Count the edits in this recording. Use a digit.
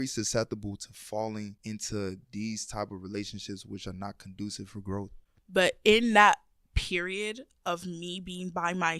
1